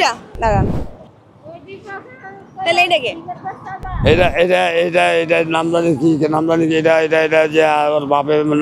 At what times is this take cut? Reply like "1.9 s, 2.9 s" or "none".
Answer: none

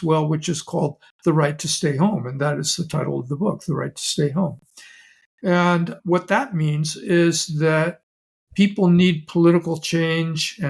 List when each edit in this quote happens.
none

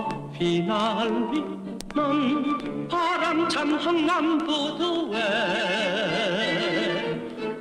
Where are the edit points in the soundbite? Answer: none

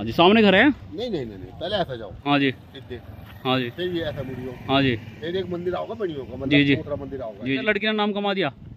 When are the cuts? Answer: 7.6 s

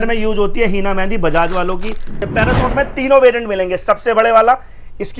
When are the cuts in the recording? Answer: 2.3 s

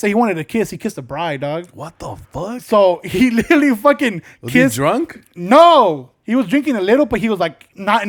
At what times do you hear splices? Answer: none

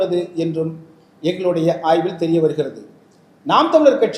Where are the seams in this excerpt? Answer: none

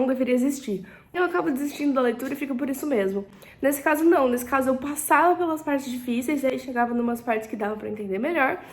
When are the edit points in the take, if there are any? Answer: 1.1 s

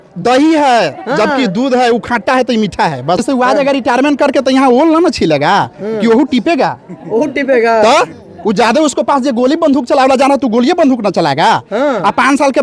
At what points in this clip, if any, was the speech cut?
3.2 s

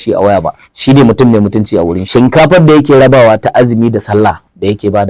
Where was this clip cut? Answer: 2.0 s

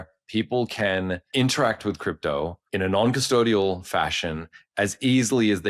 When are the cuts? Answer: 1.3 s, 2.6 s

